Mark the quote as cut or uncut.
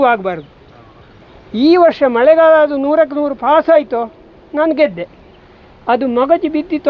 cut